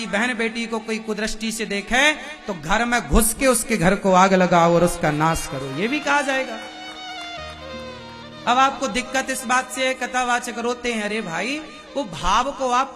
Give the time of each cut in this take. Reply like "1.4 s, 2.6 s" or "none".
none